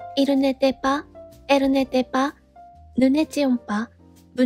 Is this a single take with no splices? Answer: yes; 0 cuts

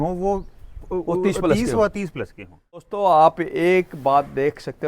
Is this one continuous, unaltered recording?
no; 1 cut; at 2.9 s

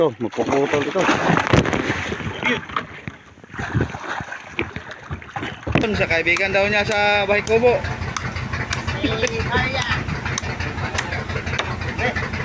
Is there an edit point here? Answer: yes; 1 cut; at 5.8 s

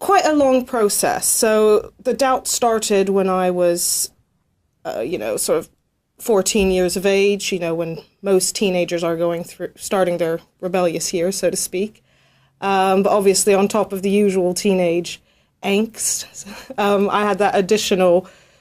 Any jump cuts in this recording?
yes; 1 cut; at 5.7 s

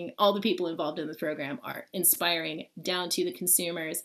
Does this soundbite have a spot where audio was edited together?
no; 0 cuts

